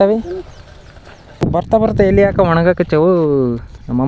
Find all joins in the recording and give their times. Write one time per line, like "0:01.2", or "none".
0:01.4